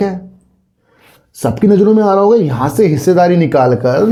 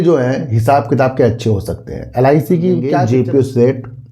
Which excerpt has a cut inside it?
second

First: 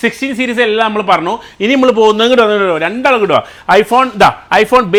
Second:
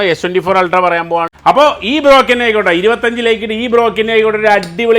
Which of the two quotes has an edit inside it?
second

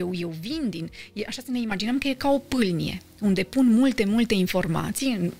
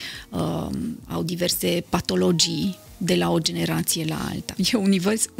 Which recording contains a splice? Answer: second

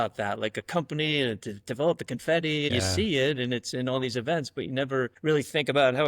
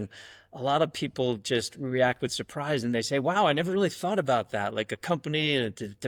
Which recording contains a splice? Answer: first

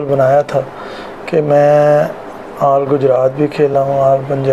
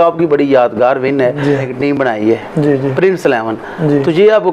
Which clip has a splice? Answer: second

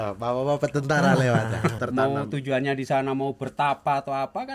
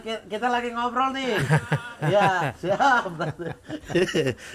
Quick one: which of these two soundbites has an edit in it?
first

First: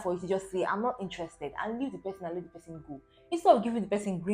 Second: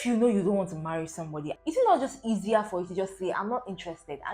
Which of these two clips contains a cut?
second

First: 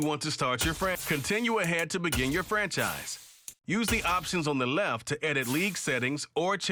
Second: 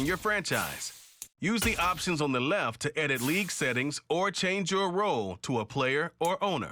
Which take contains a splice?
first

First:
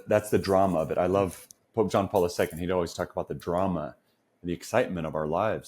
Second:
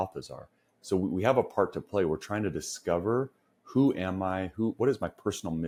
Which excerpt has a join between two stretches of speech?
first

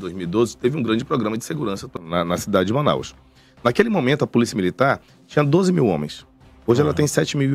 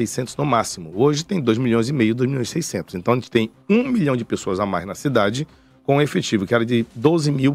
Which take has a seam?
first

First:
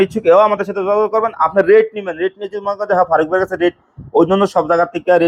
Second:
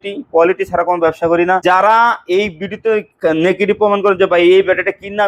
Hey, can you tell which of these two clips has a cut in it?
second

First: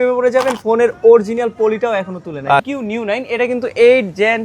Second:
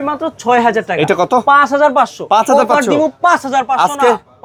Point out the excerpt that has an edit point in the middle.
first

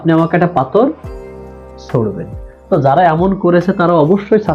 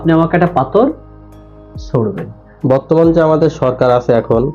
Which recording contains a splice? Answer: second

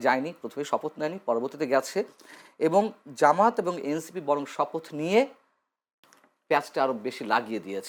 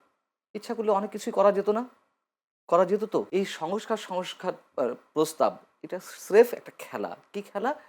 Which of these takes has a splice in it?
second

